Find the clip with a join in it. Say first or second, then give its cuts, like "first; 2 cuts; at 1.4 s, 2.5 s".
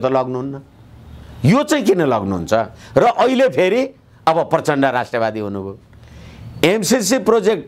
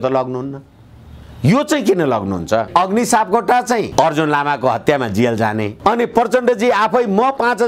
second; 3 cuts; at 2.7 s, 3.9 s, 5.7 s